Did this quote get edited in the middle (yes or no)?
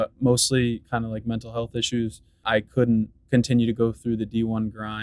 yes